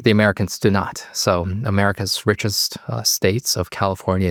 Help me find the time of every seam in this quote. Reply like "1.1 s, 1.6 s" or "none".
none